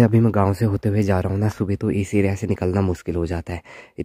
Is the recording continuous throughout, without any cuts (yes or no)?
yes